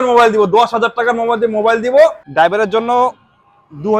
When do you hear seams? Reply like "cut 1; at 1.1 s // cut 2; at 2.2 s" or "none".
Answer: cut 1; at 2.2 s